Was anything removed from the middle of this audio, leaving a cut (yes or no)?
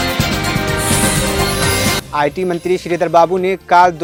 no